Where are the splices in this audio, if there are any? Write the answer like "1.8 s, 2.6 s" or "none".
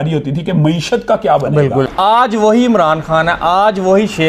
1.9 s